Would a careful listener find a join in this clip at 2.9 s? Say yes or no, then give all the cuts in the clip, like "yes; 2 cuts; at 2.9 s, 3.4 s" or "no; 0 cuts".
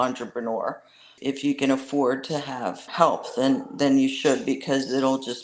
yes; 2 cuts; at 1.1 s, 2.9 s